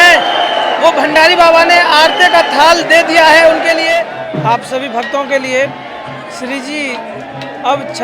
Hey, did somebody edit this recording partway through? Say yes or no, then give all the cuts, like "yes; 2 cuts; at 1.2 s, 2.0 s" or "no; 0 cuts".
yes; 1 cut; at 4.1 s